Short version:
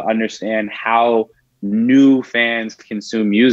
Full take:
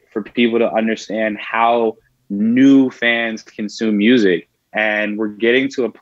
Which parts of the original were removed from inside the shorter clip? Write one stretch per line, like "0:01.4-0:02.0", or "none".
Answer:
none